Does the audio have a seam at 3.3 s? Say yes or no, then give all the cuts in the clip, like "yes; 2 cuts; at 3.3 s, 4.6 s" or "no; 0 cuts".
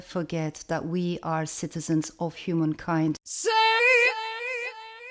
yes; 1 cut; at 3.3 s